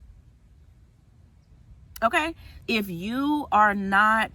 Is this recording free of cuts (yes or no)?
no